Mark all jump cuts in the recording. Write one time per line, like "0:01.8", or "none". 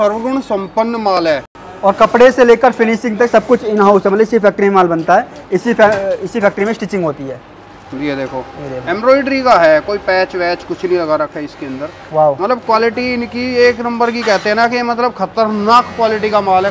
none